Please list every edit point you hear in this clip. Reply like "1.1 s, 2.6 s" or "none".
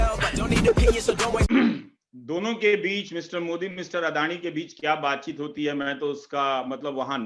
1.5 s